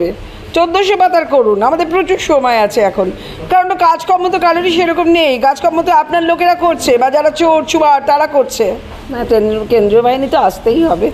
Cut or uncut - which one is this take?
uncut